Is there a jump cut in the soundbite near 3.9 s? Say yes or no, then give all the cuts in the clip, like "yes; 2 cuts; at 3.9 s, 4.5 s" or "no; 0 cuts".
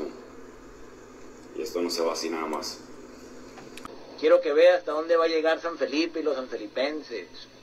yes; 1 cut; at 3.9 s